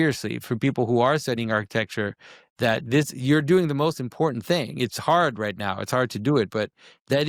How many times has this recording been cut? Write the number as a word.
zero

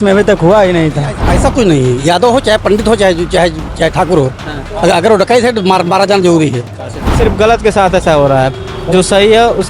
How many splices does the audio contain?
two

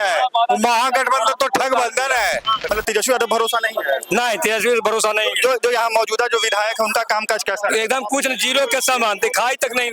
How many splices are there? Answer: one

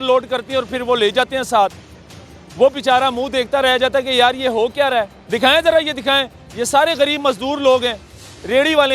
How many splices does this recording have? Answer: one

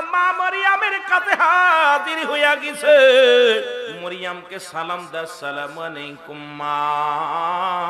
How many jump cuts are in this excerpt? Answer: one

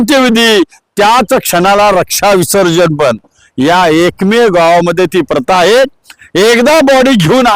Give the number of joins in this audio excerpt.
zero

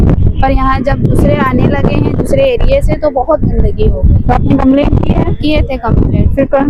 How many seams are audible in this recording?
zero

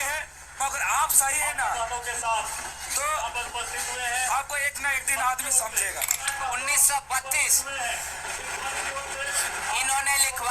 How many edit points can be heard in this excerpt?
one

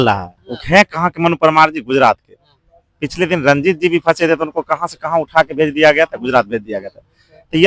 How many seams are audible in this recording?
zero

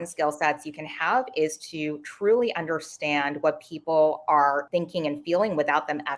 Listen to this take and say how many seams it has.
one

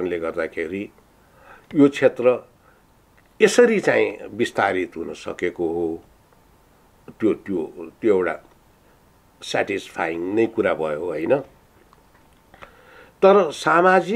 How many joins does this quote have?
zero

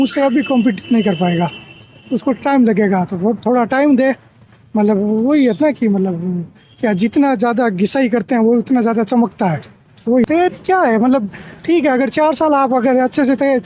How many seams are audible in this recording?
one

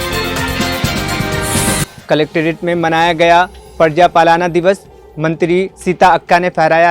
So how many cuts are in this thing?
one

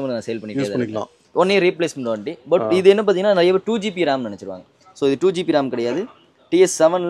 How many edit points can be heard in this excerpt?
one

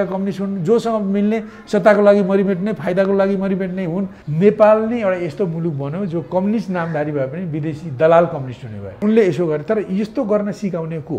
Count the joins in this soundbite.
two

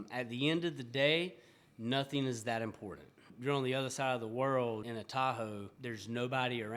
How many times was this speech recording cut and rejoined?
three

